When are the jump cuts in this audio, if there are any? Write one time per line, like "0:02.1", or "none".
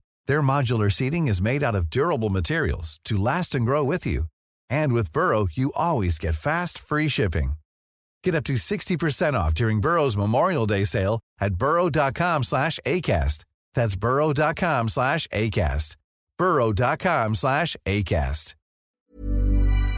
0:19.0